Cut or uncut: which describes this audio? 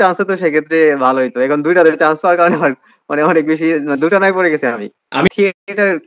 uncut